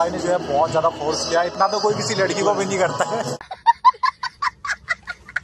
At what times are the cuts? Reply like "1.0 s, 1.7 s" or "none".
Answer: 3.4 s